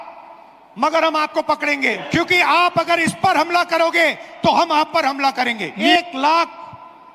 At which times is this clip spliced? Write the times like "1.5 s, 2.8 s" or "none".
2.0 s, 5.7 s